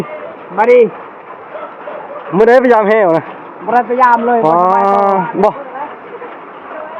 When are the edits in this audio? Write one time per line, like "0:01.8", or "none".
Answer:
none